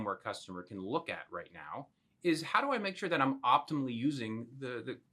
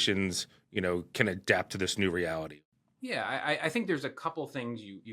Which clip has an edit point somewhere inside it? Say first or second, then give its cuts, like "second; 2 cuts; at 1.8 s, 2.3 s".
second; 1 cut; at 2.6 s